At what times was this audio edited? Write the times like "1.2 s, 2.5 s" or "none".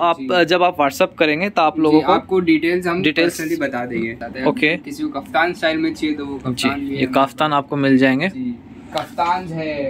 4.2 s